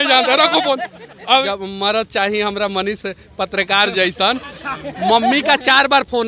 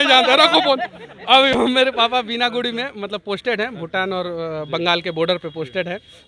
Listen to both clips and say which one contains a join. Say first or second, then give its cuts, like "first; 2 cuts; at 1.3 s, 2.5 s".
first; 1 cut; at 1.4 s